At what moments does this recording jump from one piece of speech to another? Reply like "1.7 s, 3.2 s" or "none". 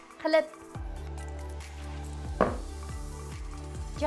none